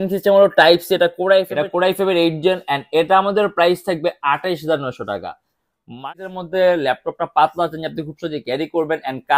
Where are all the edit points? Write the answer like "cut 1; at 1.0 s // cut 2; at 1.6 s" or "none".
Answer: cut 1; at 1.6 s // cut 2; at 6.1 s